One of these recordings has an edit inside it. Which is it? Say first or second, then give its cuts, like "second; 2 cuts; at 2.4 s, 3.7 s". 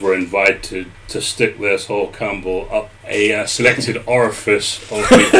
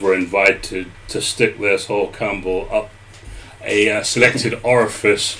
first; 1 cut; at 3.0 s